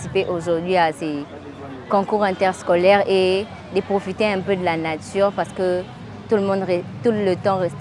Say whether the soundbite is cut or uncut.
uncut